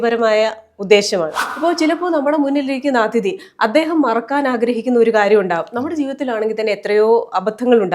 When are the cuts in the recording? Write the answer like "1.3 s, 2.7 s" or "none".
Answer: 1.4 s